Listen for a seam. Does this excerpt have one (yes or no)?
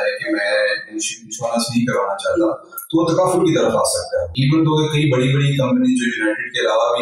yes